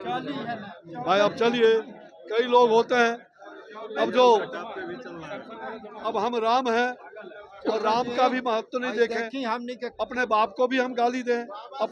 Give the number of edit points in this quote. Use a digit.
0